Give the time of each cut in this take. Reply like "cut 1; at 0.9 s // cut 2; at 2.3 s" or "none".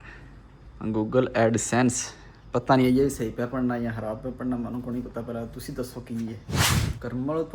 cut 1; at 6.5 s